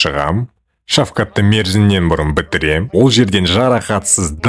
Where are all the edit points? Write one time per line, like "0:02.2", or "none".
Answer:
none